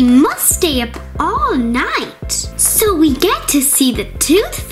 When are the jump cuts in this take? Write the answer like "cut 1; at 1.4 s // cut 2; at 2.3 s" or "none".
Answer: none